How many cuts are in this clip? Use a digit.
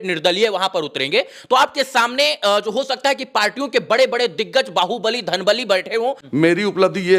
1